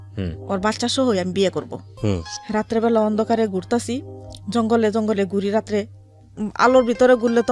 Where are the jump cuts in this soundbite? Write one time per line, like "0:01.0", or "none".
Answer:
0:01.8